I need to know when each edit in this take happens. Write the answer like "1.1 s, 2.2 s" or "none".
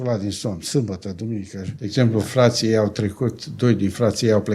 1.9 s

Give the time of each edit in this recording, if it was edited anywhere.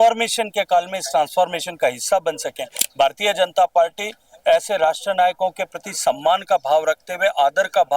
2.8 s

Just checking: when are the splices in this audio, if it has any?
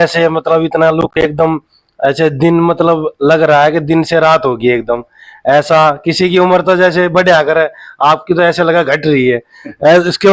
none

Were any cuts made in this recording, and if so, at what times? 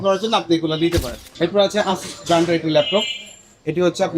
1.2 s

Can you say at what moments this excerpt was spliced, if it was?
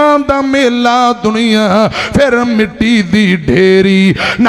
none

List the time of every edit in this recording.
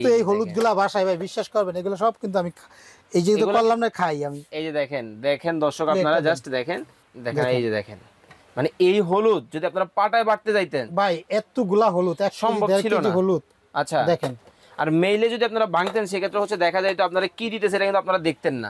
7.0 s

